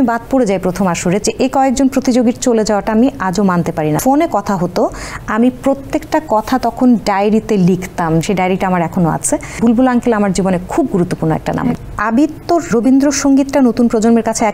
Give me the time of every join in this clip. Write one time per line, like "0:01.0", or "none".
0:01.2
0:04.0
0:08.2
0:09.6
0:11.8
0:12.7